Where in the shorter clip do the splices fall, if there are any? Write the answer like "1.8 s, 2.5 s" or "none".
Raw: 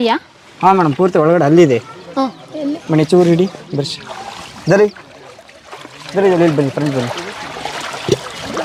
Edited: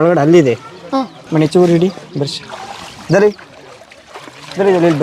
1.2 s